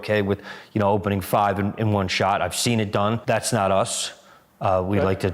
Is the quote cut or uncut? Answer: cut